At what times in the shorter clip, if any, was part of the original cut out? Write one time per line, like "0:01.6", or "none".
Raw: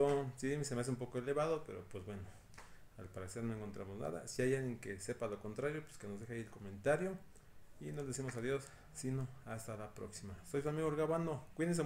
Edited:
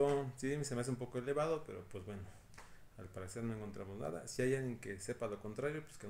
none